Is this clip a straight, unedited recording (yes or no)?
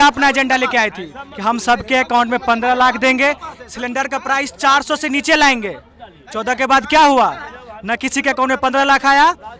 yes